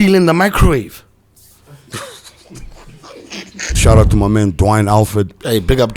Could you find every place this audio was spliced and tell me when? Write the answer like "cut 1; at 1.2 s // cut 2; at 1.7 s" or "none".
cut 1; at 3.8 s